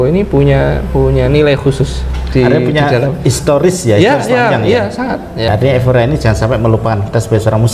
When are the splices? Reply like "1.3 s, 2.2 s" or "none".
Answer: 5.5 s

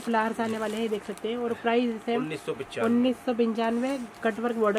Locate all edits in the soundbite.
none

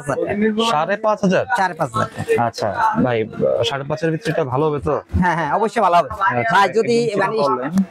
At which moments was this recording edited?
none

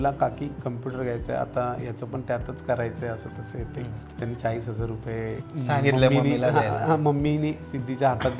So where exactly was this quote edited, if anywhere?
none

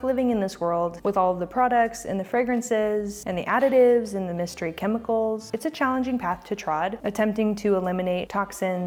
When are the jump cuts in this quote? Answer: none

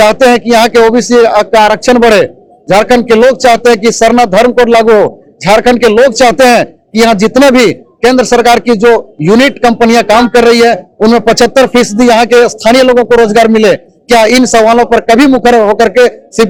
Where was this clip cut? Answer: none

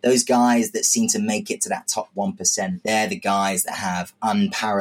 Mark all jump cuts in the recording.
2.8 s

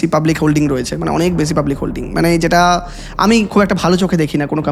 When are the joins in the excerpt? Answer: none

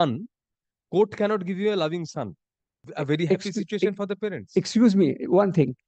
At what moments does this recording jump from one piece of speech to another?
2.8 s

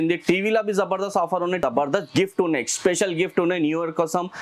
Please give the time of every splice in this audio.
1.6 s

